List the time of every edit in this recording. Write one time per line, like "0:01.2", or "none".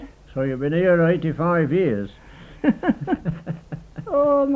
none